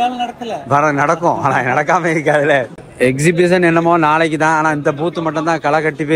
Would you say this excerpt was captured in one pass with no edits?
no; 1 cut; at 2.8 s

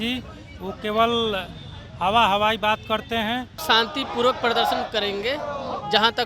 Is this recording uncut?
no; 1 cut; at 3.6 s

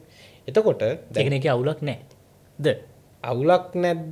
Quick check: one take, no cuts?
yes; 0 cuts

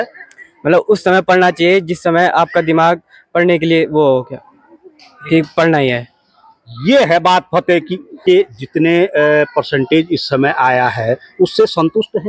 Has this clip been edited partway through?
yes; 1 cut; at 8.2 s

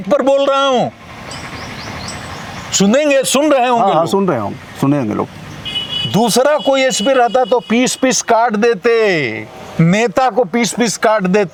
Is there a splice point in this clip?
no; 0 cuts

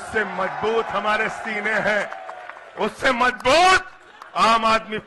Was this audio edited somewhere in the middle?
no; 0 cuts

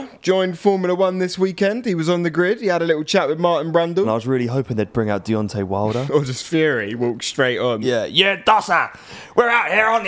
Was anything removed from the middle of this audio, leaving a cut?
yes; 3 cuts; at 4.1 s, 6.1 s, 7.8 s

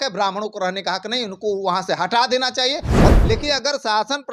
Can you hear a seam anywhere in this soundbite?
yes; 1 cut; at 3.1 s

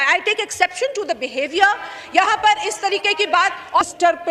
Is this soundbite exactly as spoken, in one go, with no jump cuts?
yes; 0 cuts

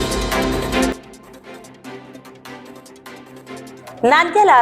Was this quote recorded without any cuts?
no; 2 cuts; at 0.9 s, 3.8 s

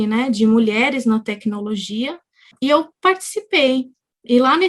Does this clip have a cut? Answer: yes; 1 cut; at 2.5 s

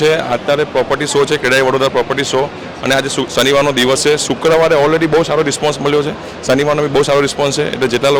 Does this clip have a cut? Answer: no; 0 cuts

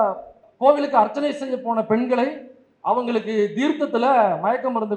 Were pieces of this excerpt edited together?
no; 0 cuts

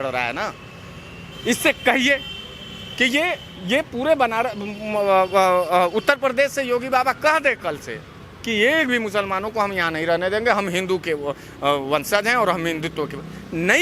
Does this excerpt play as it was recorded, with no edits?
yes; 0 cuts

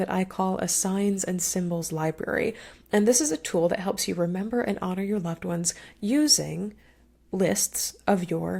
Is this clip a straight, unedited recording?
yes; 0 cuts

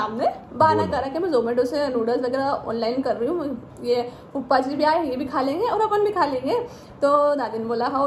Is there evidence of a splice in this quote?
no; 0 cuts

